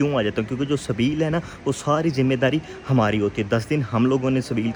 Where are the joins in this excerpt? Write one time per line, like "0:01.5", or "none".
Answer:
none